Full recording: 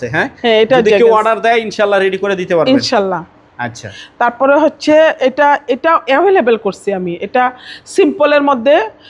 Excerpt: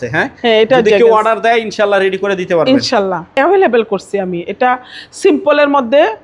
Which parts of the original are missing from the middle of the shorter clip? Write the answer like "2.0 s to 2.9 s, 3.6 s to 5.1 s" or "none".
3.3 s to 6.0 s